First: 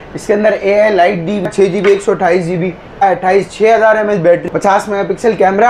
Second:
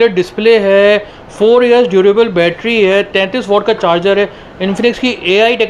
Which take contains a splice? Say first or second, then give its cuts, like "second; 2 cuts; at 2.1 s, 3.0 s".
first; 3 cuts; at 1.5 s, 3.0 s, 4.5 s